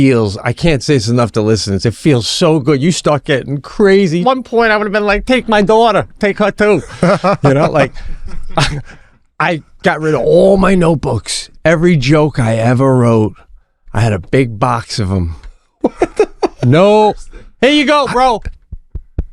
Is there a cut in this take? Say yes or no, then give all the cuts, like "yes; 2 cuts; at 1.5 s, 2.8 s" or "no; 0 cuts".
yes; 1 cut; at 4.2 s